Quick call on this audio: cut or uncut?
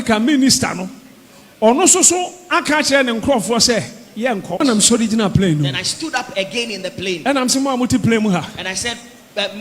cut